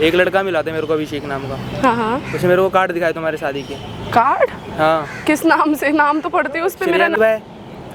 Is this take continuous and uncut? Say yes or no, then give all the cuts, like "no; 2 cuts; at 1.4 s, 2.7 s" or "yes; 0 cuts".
yes; 0 cuts